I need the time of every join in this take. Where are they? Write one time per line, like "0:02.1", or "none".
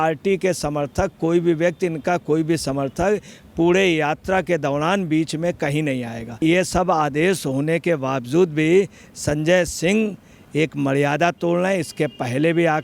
0:06.3